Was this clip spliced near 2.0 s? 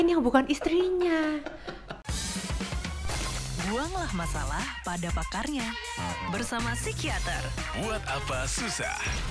yes; 1 cut; at 2.0 s

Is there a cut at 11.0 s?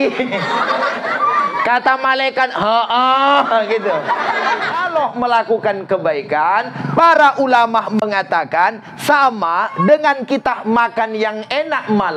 no; 1 cut; at 4.8 s

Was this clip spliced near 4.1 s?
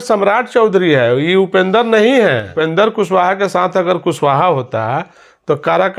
no; 1 cut; at 2.5 s

